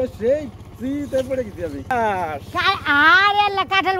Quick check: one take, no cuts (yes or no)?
no